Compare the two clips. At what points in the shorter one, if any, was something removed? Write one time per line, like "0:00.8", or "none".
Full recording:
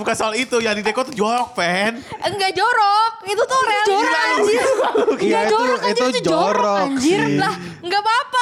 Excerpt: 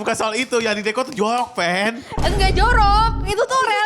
none